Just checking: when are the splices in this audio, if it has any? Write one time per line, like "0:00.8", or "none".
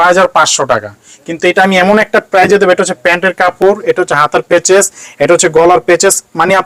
none